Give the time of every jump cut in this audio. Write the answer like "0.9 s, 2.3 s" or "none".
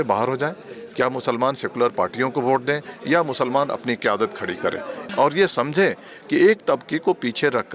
5.1 s